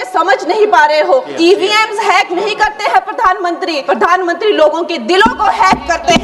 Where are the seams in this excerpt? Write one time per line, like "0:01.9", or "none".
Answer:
0:01.3
0:03.8